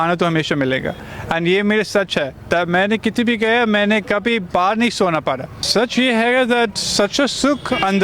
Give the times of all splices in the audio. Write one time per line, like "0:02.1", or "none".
0:05.5

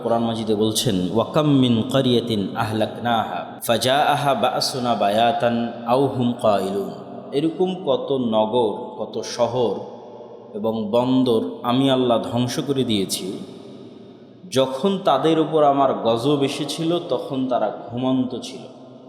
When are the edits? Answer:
0:03.5

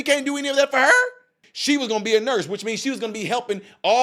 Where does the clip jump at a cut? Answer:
0:01.4

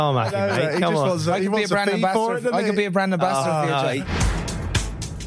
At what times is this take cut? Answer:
0:04.0

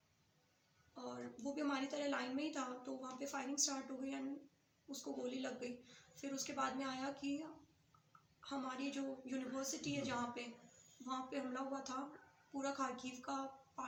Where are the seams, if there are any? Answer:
none

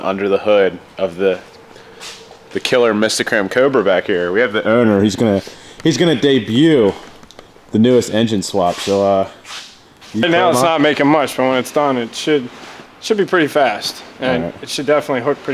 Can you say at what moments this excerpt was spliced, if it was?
0:10.2

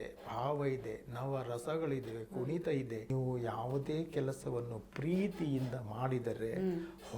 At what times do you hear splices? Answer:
0:03.1

